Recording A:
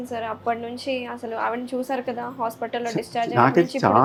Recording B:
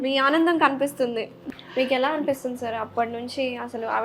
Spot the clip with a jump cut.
B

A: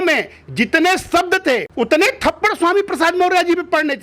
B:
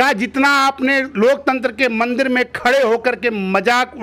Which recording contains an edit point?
A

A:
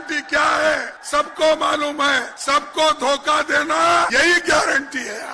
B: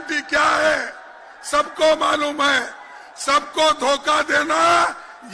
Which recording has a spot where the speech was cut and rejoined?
A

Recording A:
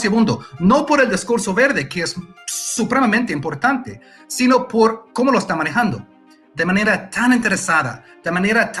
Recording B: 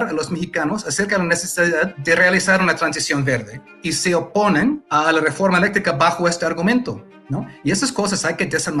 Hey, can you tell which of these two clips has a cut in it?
B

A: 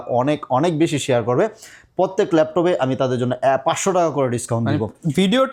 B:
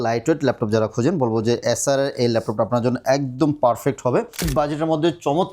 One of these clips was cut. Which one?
B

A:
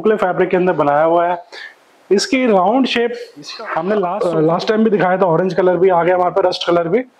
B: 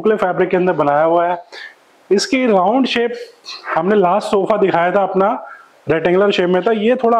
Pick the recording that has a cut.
A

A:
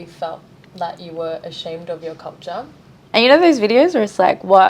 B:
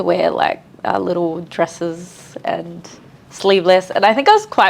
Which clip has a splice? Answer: A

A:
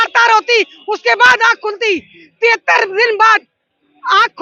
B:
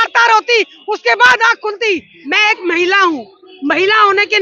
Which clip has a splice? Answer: B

